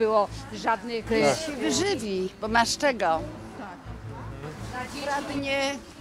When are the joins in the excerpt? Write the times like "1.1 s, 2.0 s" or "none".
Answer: none